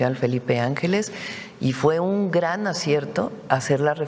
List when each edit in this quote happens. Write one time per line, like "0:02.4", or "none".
none